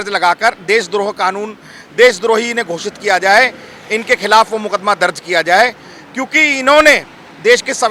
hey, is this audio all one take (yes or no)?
yes